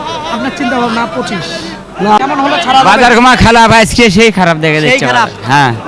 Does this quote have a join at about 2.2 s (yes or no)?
yes